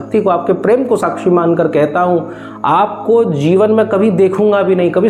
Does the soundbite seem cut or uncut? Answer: uncut